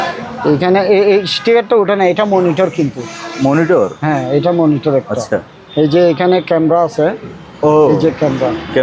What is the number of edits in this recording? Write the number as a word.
zero